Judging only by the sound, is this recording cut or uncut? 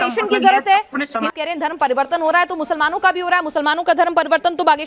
cut